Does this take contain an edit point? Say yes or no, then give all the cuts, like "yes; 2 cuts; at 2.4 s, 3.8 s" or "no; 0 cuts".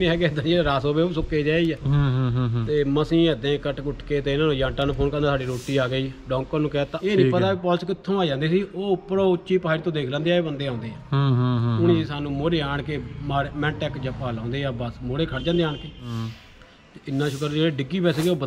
yes; 2 cuts; at 6.9 s, 16.3 s